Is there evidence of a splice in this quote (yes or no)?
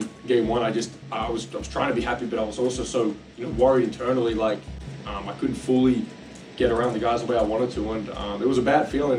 no